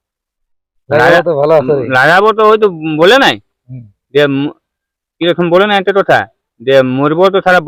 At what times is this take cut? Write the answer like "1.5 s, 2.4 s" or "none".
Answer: none